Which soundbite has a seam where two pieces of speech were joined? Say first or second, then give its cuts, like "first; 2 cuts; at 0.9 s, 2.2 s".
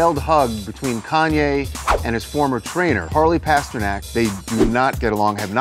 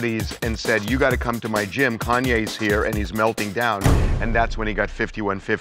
first; 2 cuts; at 3.1 s, 4.1 s